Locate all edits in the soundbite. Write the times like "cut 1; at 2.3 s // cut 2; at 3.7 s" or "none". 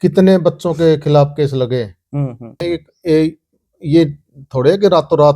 cut 1; at 2.6 s